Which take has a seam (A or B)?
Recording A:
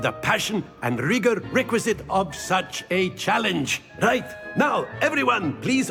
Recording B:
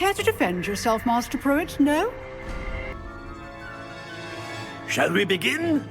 B